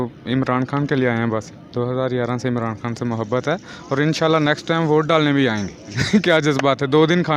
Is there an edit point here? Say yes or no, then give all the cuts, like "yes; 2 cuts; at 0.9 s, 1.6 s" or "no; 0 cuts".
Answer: yes; 2 cuts; at 1.5 s, 5.9 s